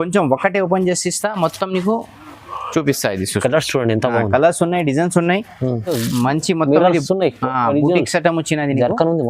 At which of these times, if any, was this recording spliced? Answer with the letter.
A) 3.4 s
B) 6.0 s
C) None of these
B